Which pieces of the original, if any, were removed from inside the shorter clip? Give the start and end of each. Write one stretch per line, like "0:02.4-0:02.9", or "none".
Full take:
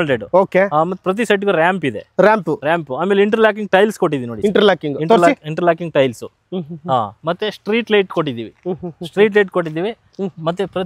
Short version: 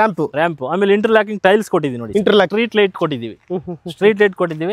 0:04.8-0:07.7